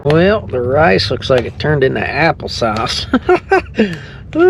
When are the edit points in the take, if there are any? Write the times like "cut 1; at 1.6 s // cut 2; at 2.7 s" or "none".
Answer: none